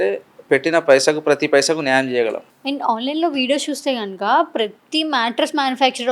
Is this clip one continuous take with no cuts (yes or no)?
no